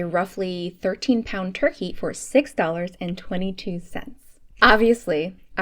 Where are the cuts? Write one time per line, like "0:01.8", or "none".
none